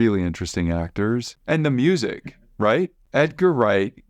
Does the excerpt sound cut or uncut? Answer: cut